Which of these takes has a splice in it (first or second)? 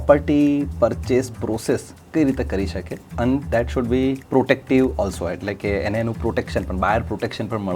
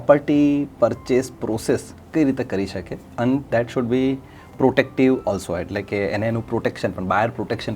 first